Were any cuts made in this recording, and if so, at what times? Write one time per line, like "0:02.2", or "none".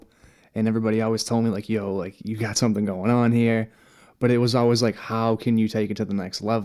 none